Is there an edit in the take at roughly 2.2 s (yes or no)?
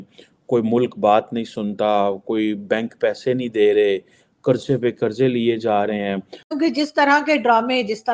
no